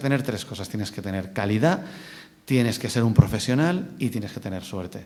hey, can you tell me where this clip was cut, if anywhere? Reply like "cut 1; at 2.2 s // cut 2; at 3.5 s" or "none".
none